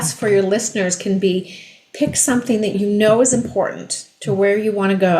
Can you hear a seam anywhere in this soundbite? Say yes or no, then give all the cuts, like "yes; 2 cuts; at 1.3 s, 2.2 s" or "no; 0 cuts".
yes; 1 cut; at 2.7 s